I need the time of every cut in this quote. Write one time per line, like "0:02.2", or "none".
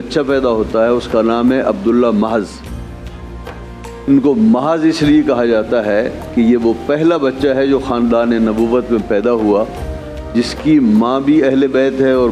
none